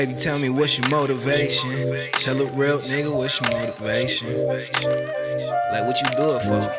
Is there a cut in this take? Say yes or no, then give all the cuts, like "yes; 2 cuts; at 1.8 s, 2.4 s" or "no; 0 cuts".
no; 0 cuts